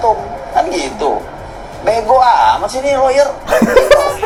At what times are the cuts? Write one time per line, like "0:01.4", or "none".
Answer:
none